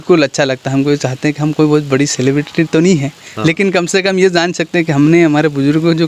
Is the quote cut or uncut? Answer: uncut